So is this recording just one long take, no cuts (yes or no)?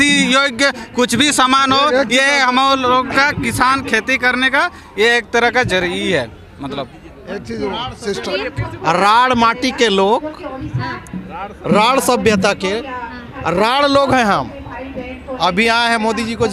yes